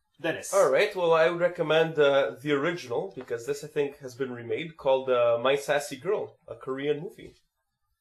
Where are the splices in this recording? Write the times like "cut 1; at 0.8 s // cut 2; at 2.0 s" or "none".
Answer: cut 1; at 6.4 s